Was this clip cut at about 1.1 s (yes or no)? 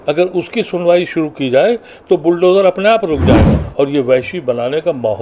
no